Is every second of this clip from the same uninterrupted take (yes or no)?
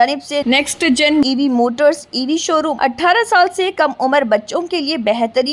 no